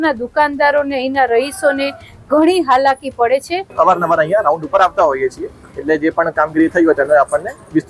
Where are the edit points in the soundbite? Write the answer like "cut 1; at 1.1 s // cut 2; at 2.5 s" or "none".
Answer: cut 1; at 3.6 s